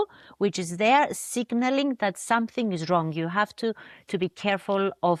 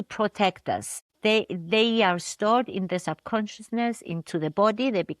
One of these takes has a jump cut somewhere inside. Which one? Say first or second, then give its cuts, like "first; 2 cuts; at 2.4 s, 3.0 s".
second; 1 cut; at 1.1 s